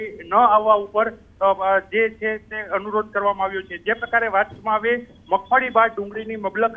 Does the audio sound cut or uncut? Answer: uncut